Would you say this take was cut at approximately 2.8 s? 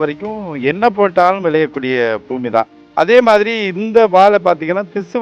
yes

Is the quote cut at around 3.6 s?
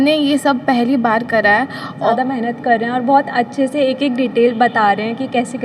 no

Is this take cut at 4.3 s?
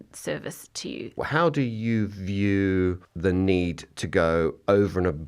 no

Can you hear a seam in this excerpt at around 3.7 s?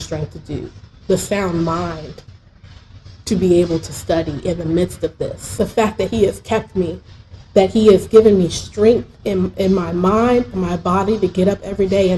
no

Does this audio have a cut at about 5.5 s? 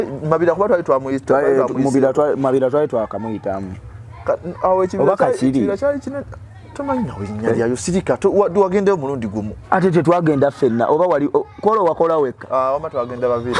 no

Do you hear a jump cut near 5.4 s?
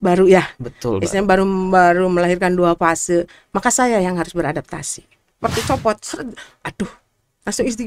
yes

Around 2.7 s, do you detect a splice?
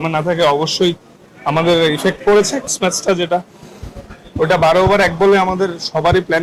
yes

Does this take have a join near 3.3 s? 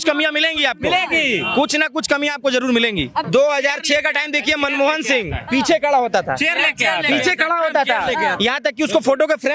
yes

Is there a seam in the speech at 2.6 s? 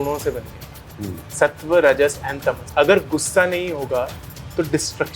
yes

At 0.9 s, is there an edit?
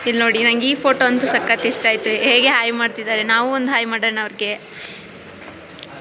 yes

